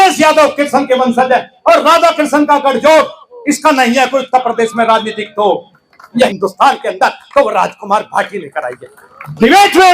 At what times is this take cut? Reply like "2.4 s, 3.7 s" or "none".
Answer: 6.3 s